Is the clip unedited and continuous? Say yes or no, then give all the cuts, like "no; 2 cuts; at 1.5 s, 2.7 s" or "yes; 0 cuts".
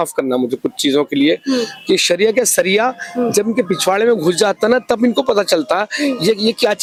yes; 0 cuts